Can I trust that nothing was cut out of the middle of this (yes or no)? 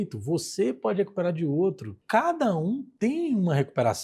no